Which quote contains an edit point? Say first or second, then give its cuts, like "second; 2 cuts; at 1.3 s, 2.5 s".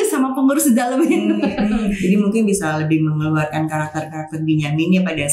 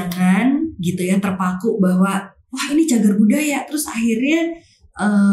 first; 1 cut; at 1.9 s